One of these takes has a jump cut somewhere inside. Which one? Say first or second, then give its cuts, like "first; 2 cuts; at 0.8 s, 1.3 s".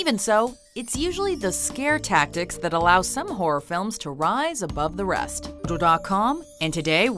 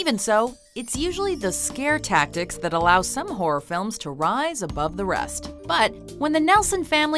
second; 1 cut; at 5.6 s